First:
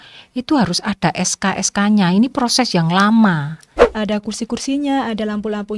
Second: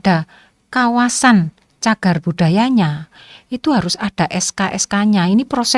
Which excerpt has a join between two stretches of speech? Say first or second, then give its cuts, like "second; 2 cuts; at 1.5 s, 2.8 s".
first; 1 cut; at 3.8 s